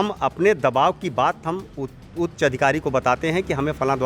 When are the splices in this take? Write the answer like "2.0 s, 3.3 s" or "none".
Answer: none